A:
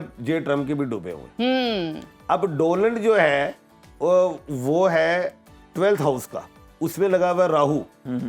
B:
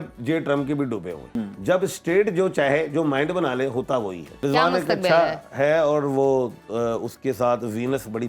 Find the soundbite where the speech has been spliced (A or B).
B